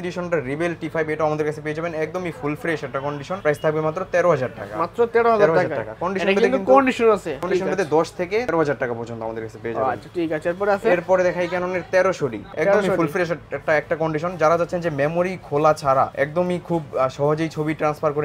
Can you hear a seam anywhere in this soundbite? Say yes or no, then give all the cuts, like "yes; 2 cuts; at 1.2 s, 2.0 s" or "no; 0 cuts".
no; 0 cuts